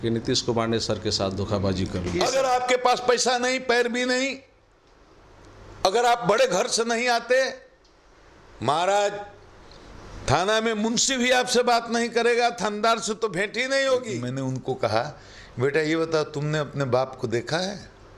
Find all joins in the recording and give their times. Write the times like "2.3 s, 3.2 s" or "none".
2.1 s, 14.3 s